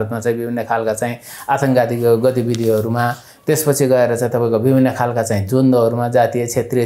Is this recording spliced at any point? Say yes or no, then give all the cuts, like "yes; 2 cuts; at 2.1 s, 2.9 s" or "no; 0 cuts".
no; 0 cuts